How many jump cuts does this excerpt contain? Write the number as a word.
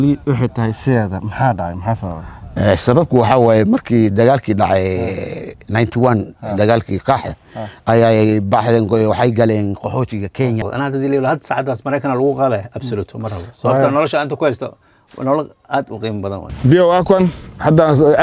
two